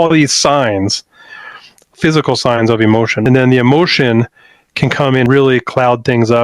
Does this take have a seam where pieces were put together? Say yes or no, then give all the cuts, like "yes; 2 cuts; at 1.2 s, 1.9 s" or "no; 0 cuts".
yes; 3 cuts; at 1.9 s, 3.2 s, 5.3 s